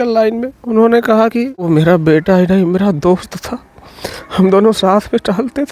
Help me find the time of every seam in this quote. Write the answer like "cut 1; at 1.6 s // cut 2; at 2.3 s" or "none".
cut 1; at 1.6 s